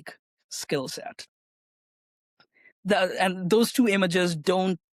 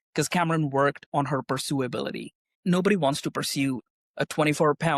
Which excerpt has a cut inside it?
second; 2 cuts; at 2.6 s, 3.9 s

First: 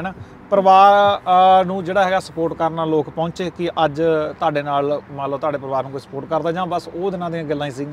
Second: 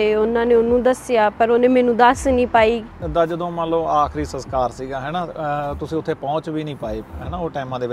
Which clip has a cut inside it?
second; 1 cut; at 3.0 s

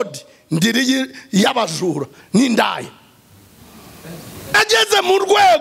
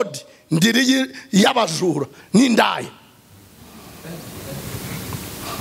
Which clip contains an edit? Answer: first; 1 cut; at 4.6 s

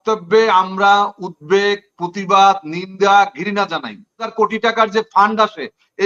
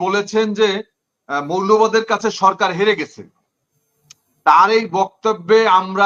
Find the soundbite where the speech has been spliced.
first; 1 cut; at 4.3 s

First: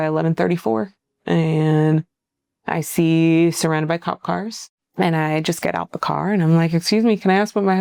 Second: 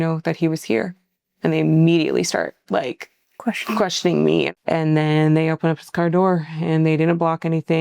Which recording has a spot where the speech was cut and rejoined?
second; 1 cut; at 4.5 s

